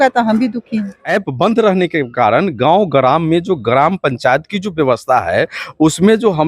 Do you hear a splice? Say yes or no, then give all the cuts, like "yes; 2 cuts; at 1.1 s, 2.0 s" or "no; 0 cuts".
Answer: yes; 1 cut; at 1.0 s